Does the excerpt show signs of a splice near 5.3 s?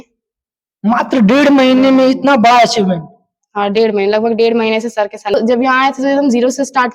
yes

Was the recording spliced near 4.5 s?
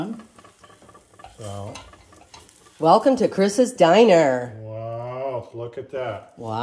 no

